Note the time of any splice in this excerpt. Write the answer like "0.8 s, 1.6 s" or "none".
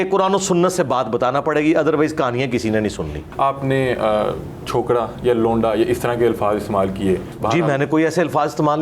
3.2 s, 7.3 s